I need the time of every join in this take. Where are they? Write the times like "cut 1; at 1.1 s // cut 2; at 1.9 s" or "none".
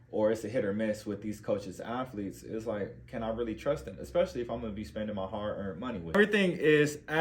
cut 1; at 6.2 s